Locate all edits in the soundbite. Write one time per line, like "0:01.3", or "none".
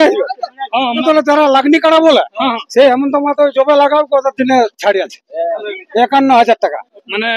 0:01.0